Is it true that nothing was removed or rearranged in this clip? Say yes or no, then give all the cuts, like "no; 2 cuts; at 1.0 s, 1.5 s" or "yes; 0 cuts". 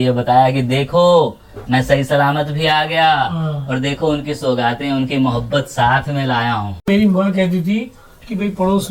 no; 1 cut; at 6.8 s